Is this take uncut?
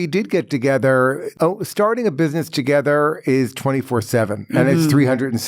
no; 1 cut; at 1.3 s

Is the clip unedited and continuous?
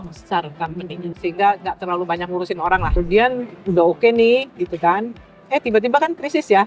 no; 1 cut; at 2.9 s

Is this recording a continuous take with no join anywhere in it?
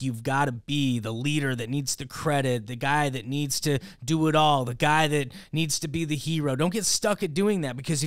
yes; 0 cuts

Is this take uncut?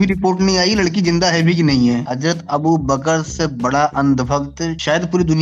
no; 1 cut; at 2.1 s

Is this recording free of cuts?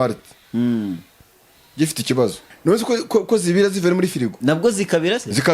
no; 2 cuts; at 2.5 s, 4.3 s

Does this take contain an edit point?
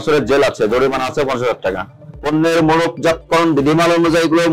yes; 1 cut; at 2.0 s

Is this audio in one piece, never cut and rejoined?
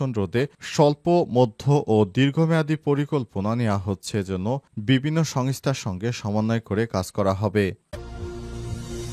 no; 1 cut; at 7.8 s

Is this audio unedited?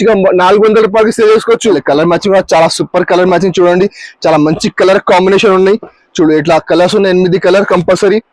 no; 1 cut; at 1.8 s

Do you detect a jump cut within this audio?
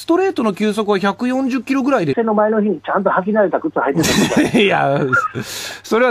no; 0 cuts

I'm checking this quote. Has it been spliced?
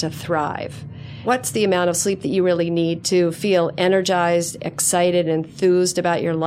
yes; 2 cuts; at 1.2 s, 3.0 s

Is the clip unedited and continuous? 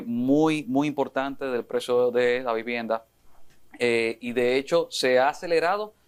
yes; 0 cuts

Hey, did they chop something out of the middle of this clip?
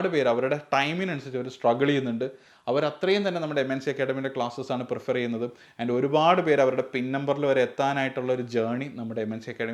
no; 0 cuts

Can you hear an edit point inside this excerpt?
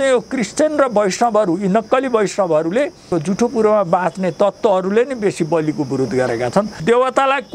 yes; 2 cuts; at 3.1 s, 6.8 s

